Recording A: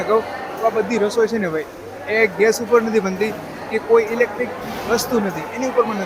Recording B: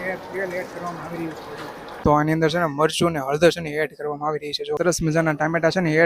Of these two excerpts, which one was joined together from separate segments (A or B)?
B